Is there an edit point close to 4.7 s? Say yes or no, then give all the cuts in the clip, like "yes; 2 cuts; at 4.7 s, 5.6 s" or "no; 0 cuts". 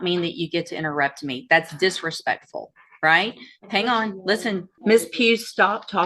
yes; 1 cut; at 4.7 s